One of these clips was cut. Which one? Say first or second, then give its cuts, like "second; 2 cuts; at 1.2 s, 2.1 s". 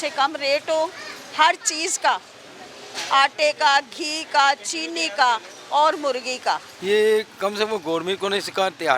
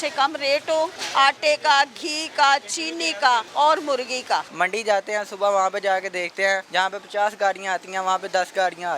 second; 4 cuts; at 1.0 s, 3.5 s, 4.5 s, 6.7 s